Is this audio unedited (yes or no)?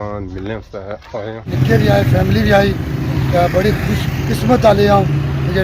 no